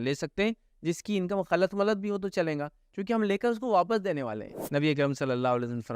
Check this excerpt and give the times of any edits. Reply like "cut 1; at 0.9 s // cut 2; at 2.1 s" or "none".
cut 1; at 4.5 s